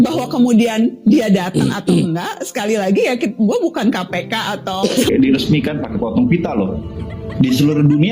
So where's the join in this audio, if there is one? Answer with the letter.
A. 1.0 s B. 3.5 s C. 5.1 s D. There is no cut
C